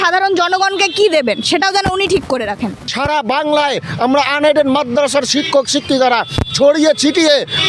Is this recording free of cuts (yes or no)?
no